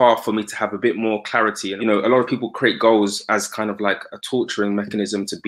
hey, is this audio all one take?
no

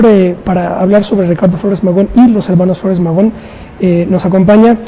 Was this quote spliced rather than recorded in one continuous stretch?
yes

